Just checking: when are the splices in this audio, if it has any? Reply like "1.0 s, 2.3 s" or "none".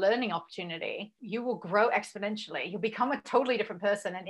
1.2 s

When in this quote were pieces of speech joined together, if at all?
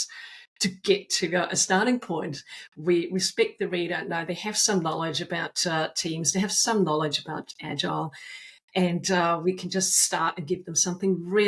none

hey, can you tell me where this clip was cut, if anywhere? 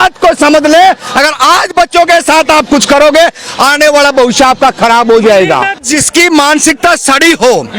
5.9 s

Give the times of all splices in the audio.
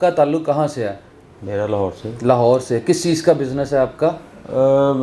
none

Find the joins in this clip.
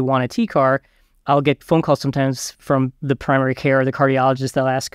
1.2 s, 3.0 s

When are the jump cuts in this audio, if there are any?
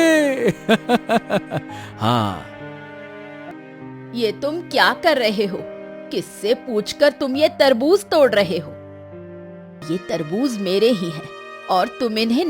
3.5 s, 9.8 s

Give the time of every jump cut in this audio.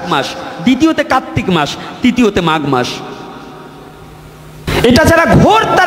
4.7 s

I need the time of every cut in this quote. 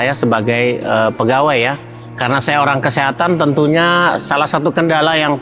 2.0 s

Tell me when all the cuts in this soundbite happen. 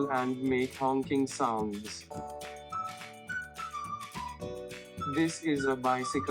1.9 s, 4.4 s

